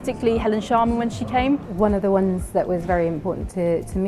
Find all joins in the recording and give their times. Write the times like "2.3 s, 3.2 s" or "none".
1.7 s